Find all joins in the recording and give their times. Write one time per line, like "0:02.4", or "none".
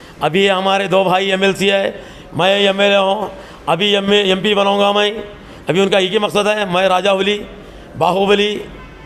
none